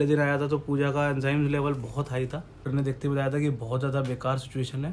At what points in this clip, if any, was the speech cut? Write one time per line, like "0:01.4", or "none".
0:02.6